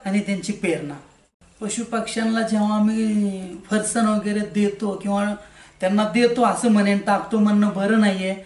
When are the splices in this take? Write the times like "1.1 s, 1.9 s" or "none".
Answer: 1.2 s